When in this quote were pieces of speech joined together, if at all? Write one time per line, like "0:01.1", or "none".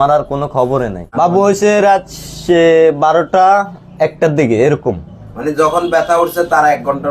0:01.0

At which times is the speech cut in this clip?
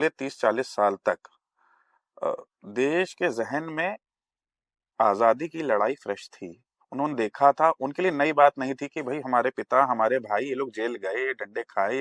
none

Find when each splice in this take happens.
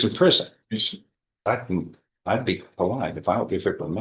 0:01.4

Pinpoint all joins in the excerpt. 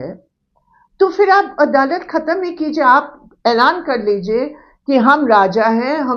none

